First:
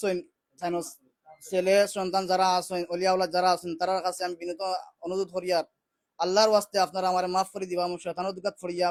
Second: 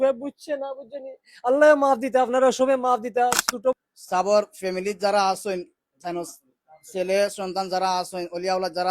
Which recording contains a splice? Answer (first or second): second